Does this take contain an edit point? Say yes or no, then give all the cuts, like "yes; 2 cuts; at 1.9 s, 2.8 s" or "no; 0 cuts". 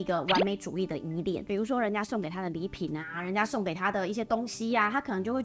yes; 1 cut; at 1.4 s